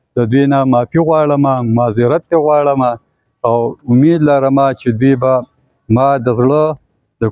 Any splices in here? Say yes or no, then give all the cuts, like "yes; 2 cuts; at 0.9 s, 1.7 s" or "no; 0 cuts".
no; 0 cuts